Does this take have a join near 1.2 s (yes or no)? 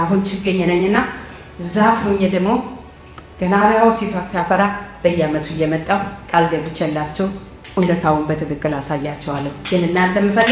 no